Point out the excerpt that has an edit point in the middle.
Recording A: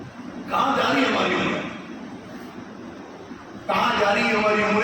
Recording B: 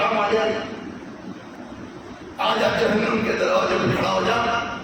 B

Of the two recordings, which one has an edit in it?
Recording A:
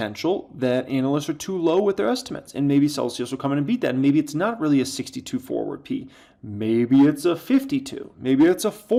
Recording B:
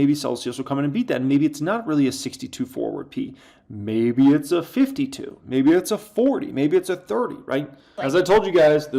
B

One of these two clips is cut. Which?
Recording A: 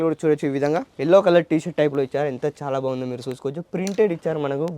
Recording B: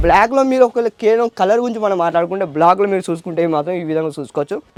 A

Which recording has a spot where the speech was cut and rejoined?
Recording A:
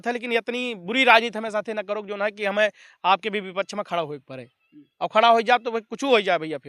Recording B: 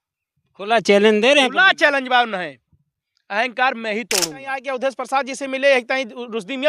B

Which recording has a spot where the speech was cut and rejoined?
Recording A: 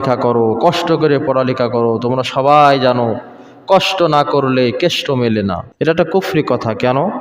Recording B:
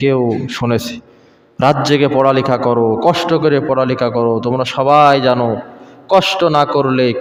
A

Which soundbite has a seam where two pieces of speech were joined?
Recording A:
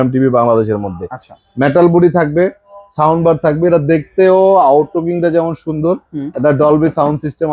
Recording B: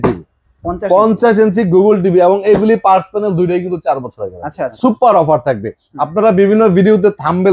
B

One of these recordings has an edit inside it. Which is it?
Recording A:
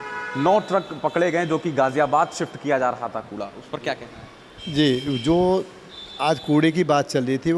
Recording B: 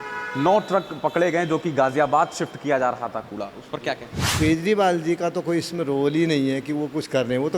B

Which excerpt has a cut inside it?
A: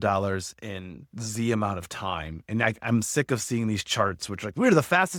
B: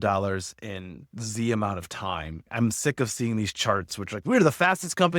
B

